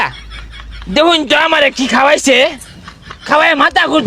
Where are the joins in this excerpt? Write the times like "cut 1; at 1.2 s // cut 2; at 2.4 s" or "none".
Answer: none